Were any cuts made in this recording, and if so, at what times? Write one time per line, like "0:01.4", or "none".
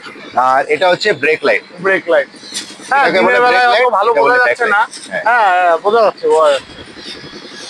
none